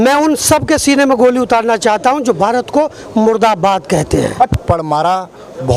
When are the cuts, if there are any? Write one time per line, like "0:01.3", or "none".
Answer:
0:04.5